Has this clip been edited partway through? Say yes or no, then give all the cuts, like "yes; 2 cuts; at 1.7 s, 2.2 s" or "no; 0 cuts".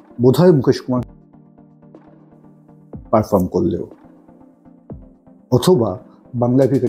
yes; 2 cuts; at 3.9 s, 5.4 s